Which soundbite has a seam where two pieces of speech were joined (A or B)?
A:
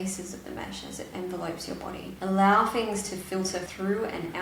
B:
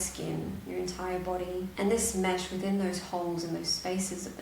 B